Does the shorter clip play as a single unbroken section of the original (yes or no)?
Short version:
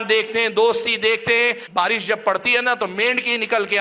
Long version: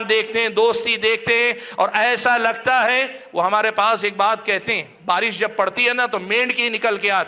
no